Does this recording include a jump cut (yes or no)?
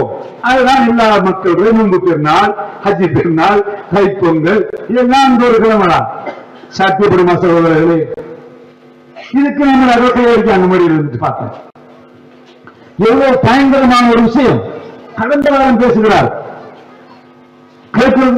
no